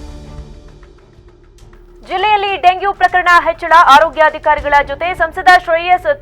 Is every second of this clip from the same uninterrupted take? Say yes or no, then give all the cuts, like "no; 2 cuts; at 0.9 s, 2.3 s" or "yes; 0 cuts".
no; 1 cut; at 1.0 s